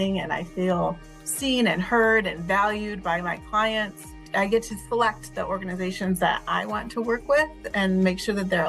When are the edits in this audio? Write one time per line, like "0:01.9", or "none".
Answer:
0:04.3